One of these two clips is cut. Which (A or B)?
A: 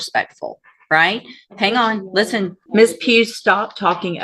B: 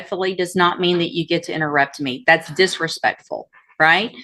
A